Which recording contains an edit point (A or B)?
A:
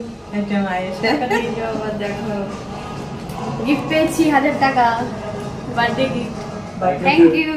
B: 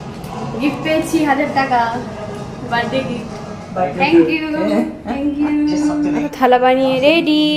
B